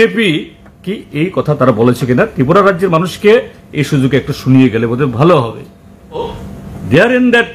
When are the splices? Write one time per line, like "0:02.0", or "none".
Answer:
0:06.2